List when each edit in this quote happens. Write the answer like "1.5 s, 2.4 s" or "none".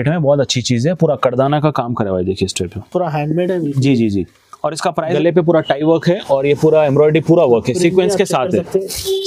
5.1 s